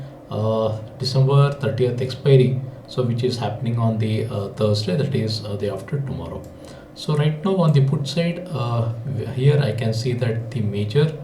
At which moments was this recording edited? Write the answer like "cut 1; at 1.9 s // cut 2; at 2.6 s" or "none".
none